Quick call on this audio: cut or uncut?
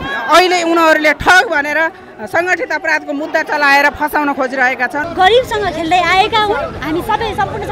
cut